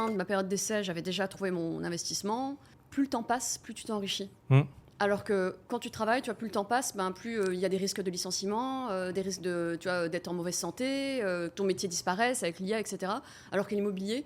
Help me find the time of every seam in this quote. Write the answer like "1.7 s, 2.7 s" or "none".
2.7 s